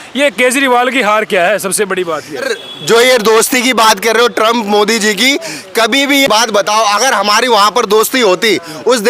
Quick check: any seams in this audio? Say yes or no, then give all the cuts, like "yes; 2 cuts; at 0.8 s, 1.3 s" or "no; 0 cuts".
yes; 2 cuts; at 2.5 s, 6.5 s